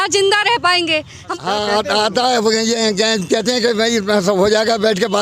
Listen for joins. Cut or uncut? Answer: cut